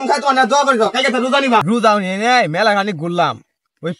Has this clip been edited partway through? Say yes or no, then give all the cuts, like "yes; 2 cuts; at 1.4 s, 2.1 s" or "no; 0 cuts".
yes; 1 cut; at 1.6 s